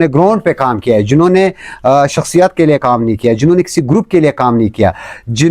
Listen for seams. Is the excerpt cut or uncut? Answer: uncut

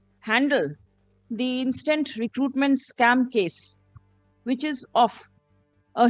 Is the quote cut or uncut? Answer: uncut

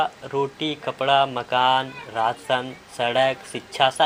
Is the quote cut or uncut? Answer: uncut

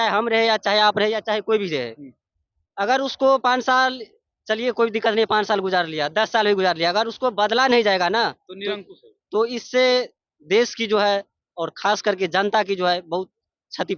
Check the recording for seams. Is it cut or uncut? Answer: uncut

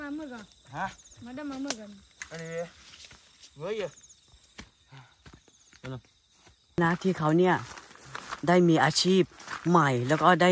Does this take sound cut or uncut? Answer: cut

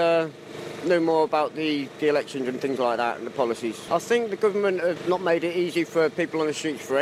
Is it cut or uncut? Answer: uncut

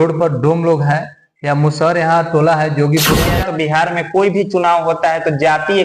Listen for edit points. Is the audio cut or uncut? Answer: cut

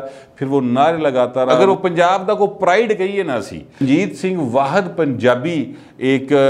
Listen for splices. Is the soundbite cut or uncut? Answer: cut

